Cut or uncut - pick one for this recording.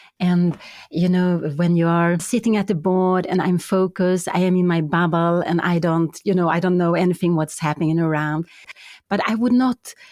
cut